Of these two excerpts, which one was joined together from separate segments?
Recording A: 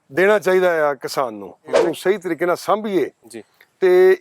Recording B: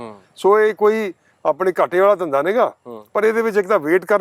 A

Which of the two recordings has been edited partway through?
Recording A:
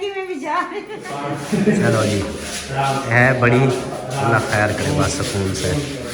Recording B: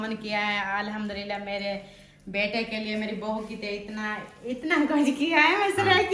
A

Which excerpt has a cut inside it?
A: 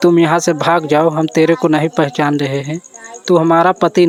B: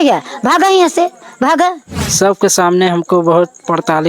B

